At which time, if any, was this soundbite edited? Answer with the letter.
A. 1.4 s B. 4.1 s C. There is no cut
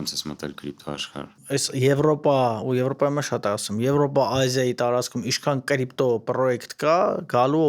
A